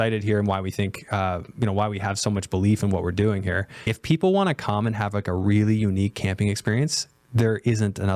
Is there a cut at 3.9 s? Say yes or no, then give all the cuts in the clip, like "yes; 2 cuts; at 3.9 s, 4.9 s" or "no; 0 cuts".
yes; 1 cut; at 3.9 s